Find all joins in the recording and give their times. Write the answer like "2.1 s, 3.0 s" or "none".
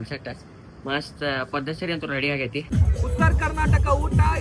2.7 s